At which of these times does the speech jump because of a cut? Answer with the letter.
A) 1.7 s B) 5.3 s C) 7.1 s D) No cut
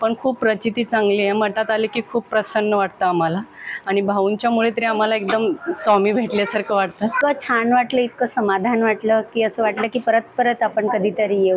C